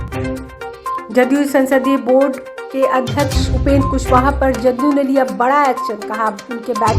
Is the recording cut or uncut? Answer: cut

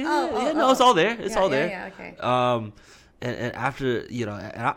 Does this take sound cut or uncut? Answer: uncut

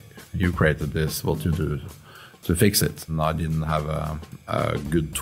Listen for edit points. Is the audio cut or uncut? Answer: cut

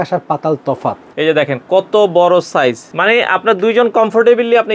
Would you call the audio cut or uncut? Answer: cut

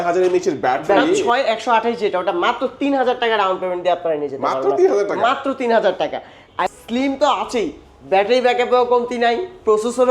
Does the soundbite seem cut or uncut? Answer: cut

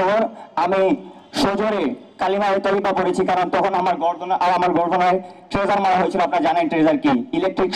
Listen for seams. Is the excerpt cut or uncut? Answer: uncut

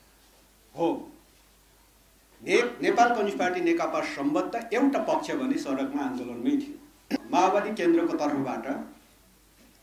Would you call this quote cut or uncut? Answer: cut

